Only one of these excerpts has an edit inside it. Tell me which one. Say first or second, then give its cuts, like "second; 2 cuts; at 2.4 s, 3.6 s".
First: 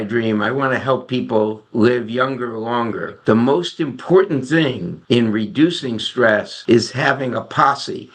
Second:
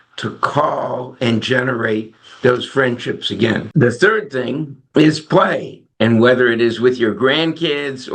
first; 3 cuts; at 3.1 s, 4.9 s, 6.5 s